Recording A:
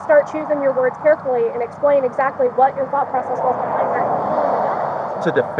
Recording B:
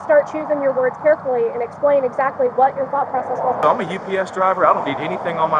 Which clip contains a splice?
B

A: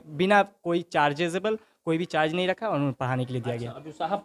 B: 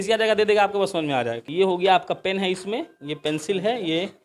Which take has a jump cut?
B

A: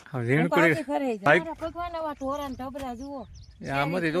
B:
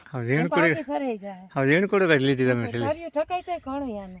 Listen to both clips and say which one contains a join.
A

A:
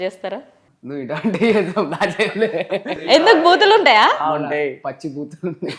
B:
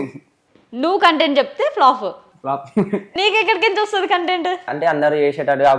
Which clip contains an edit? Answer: B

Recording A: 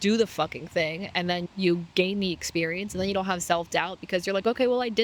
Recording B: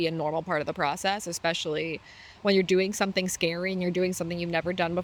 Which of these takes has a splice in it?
A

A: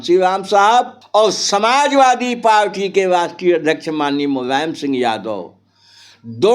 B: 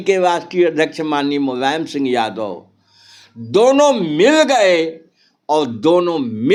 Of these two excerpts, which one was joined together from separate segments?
A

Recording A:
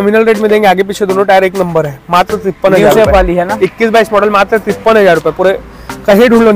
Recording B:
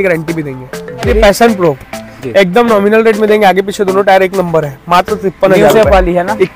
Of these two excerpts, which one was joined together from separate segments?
B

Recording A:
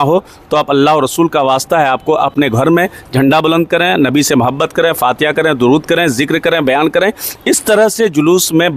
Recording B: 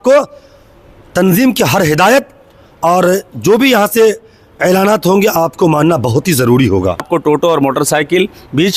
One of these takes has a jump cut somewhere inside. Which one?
B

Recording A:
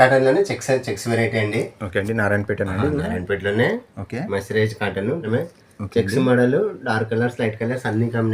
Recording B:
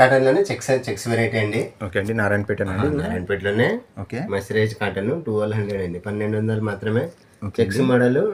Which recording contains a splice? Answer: A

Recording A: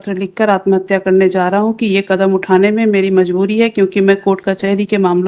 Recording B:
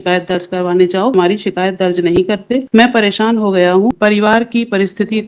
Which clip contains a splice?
B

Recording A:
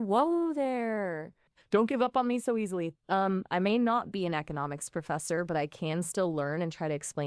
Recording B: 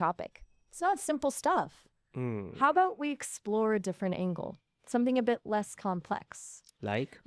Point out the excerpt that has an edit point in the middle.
A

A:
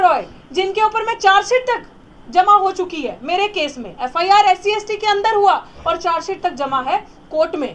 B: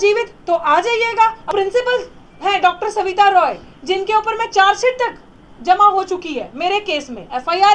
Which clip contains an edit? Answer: B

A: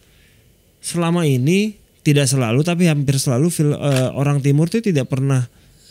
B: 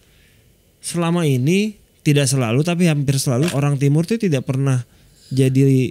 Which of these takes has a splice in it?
B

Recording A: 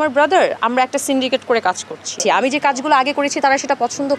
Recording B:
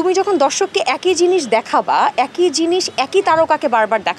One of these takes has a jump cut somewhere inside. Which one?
A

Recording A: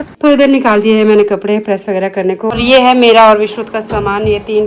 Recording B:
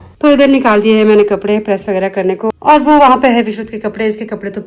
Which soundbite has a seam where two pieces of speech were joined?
A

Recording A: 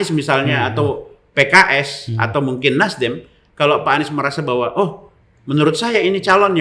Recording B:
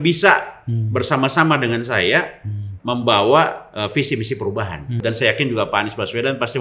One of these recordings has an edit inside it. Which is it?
B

